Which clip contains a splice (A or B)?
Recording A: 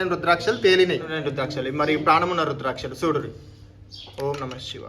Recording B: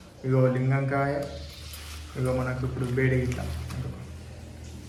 A